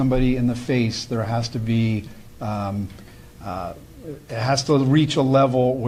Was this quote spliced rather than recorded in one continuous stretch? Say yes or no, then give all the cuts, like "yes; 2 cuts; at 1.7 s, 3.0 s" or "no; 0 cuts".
no; 0 cuts